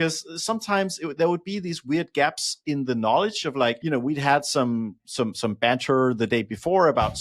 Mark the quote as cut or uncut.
cut